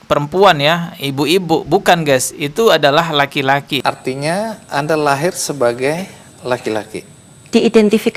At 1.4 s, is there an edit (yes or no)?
no